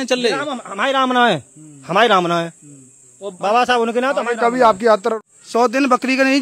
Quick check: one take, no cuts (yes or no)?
no